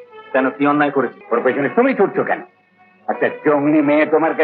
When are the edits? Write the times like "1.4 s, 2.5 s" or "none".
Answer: 1.2 s